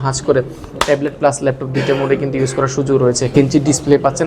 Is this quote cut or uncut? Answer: cut